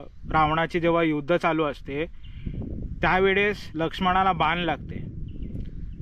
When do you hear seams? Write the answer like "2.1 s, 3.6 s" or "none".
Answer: none